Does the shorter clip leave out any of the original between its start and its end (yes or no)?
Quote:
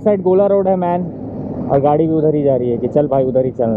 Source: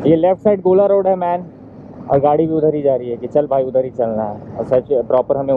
no